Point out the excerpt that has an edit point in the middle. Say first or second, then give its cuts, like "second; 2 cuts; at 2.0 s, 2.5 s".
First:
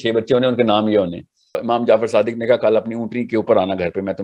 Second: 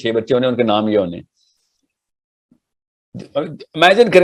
first; 1 cut; at 1.6 s